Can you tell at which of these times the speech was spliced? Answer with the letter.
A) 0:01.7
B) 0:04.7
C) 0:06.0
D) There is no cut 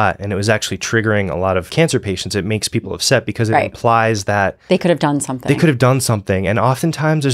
A